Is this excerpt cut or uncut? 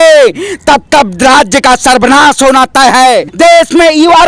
cut